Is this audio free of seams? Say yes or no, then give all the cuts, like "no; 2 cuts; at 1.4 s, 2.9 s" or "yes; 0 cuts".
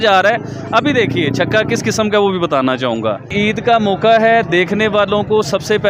no; 1 cut; at 3.3 s